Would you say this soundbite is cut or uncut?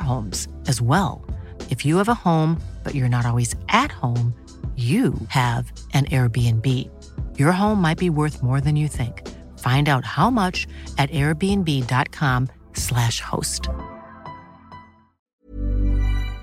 cut